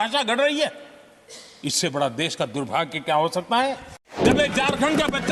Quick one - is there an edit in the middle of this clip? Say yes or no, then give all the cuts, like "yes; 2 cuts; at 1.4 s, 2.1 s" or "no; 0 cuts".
yes; 1 cut; at 4.2 s